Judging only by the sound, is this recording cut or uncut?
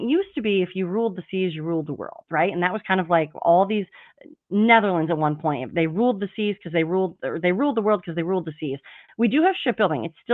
cut